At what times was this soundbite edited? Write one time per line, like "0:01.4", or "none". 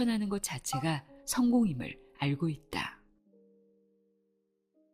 0:03.0